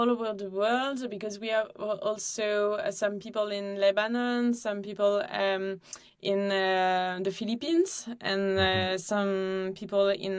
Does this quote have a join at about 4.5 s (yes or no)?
no